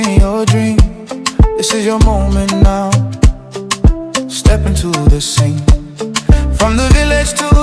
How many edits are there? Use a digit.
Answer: 1